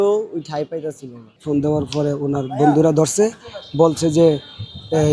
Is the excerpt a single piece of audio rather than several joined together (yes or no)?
no